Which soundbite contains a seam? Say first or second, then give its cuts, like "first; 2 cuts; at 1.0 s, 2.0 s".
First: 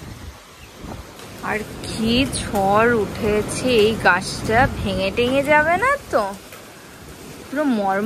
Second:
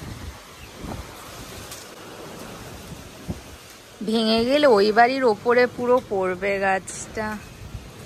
first; 1 cut; at 1.3 s